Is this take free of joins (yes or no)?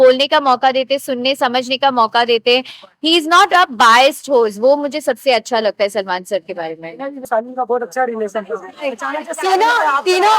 yes